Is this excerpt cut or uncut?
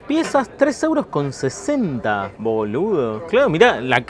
uncut